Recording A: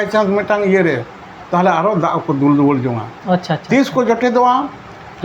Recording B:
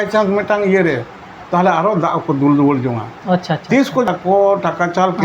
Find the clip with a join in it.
B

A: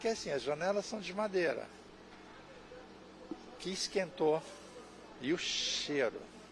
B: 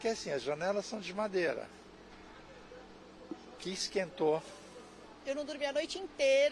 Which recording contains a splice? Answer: B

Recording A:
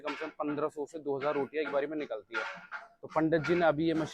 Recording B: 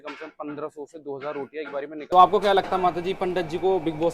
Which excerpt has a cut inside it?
B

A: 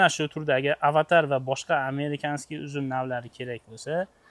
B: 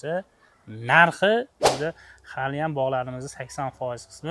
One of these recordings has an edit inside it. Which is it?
B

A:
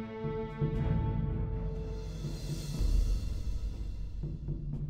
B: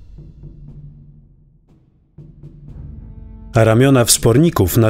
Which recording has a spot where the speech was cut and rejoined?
B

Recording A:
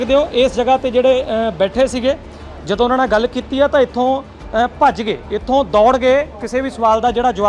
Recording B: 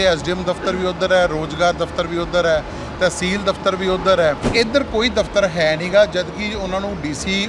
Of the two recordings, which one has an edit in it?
B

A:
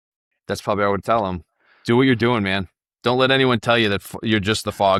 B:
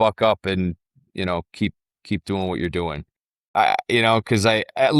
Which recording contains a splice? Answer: B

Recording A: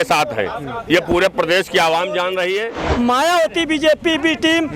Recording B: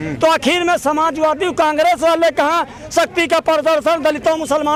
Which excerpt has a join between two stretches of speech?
A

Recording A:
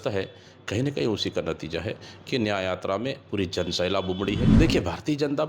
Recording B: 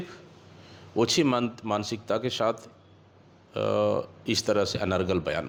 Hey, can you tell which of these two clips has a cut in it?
A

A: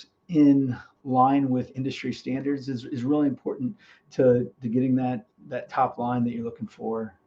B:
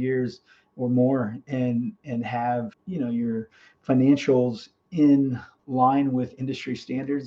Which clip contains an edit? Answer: B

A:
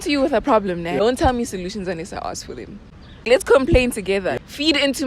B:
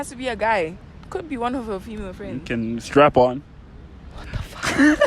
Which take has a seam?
A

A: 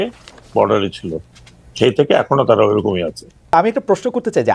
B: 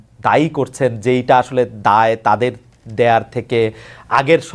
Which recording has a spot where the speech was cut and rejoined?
A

